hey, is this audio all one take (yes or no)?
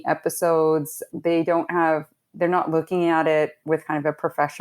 no